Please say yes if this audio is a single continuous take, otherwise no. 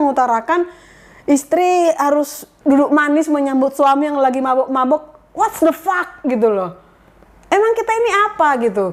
yes